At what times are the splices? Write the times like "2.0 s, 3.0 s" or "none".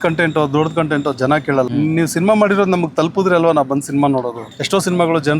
1.7 s, 4.5 s